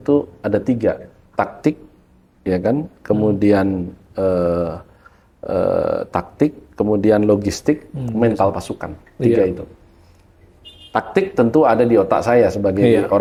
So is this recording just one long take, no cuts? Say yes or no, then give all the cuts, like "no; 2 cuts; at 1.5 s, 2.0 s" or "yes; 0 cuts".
yes; 0 cuts